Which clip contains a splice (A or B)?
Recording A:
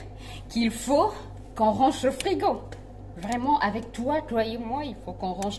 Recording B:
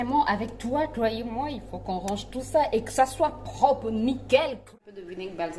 B